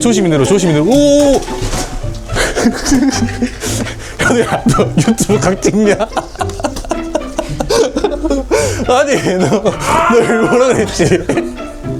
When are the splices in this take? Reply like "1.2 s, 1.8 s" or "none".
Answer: none